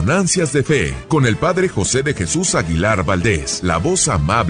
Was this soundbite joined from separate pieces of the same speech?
yes; 2 cuts; at 1.0 s, 3.5 s

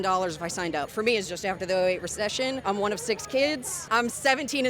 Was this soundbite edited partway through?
yes; 3 cuts; at 0.9 s, 2.6 s, 3.7 s

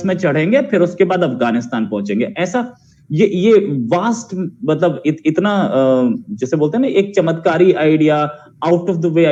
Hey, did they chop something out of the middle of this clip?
no; 0 cuts

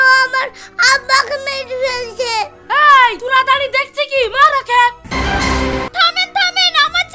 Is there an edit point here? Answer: no; 0 cuts

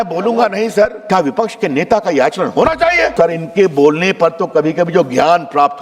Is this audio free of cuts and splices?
no; 2 cuts; at 1.0 s, 3.1 s

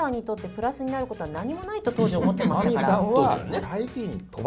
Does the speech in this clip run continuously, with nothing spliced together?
no; 1 cut; at 3.5 s

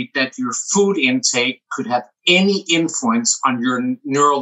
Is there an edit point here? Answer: no; 0 cuts

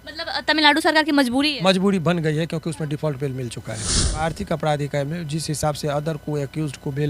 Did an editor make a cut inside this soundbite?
yes; 1 cut; at 4.2 s

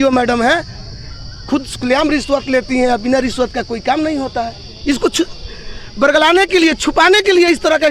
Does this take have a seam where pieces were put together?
no; 0 cuts

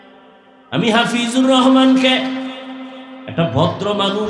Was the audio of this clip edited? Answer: no; 0 cuts

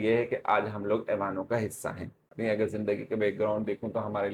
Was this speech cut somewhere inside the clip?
yes; 1 cut; at 2.3 s

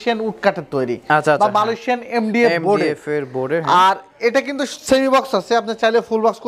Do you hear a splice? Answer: no; 0 cuts

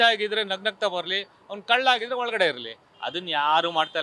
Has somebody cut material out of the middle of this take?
no; 0 cuts

